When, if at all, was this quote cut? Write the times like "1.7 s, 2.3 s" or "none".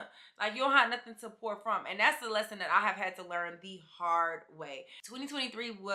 none